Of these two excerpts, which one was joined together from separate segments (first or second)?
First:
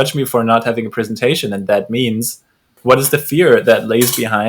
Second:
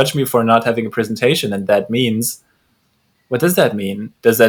first